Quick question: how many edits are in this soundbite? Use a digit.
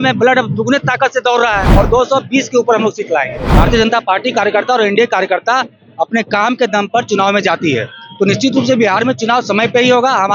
2